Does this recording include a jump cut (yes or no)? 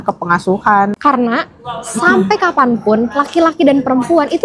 yes